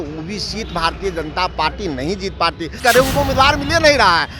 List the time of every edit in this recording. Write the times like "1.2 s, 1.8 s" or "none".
2.8 s